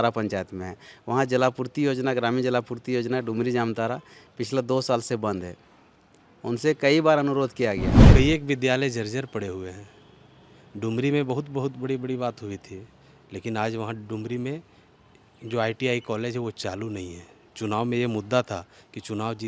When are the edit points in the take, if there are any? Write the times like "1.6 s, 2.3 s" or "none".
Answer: 7.9 s